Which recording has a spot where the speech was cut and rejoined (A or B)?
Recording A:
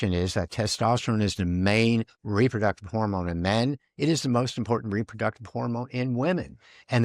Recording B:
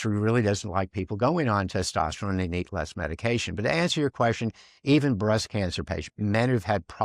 A